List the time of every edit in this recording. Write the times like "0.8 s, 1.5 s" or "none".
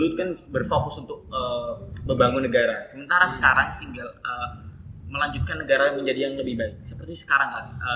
none